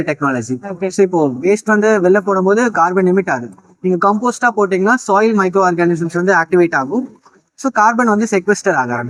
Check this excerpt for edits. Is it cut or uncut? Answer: uncut